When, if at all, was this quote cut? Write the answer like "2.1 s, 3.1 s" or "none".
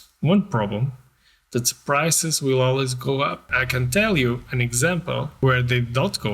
3.6 s, 5.3 s